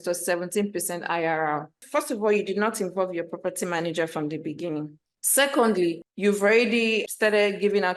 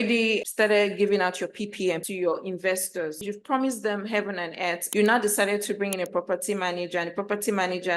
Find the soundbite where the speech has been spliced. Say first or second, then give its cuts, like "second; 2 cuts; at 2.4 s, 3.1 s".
second; 2 cuts; at 3.2 s, 4.9 s